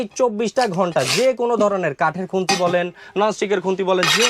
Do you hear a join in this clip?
no; 0 cuts

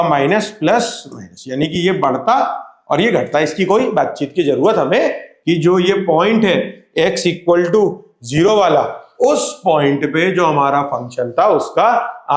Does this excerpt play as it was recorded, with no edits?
no; 1 cut; at 5.3 s

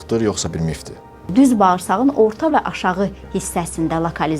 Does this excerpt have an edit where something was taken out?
yes; 1 cut; at 1.2 s

